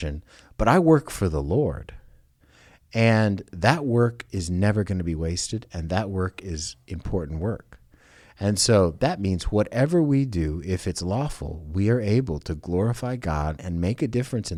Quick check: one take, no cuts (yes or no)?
yes